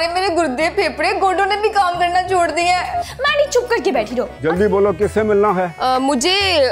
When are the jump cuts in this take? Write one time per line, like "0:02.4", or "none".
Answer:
0:04.3